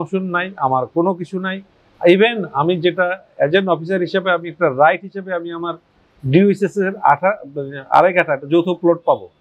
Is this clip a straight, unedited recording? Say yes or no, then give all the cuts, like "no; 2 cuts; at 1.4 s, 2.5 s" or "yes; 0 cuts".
yes; 0 cuts